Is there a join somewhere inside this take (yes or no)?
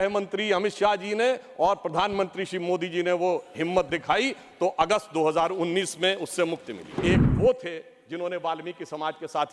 yes